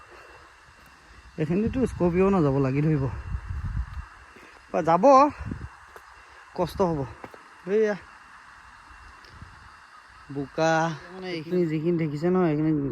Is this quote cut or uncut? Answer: cut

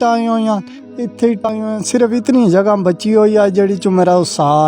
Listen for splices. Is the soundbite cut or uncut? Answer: cut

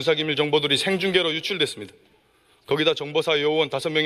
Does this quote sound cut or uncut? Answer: uncut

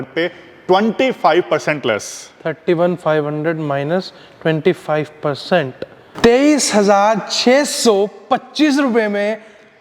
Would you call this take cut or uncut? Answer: uncut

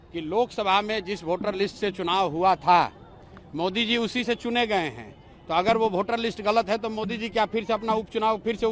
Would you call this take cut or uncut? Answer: uncut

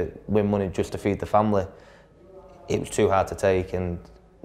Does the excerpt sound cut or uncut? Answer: uncut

